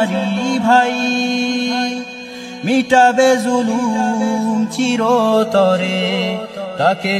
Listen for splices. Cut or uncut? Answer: uncut